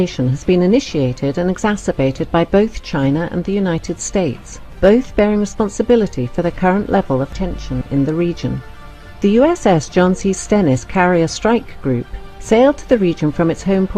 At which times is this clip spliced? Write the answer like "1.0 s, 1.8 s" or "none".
2.6 s